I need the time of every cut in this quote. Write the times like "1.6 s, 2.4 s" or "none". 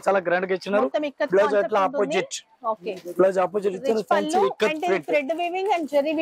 none